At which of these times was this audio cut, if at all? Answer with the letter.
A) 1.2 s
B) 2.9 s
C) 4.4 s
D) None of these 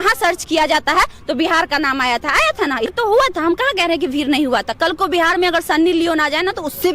B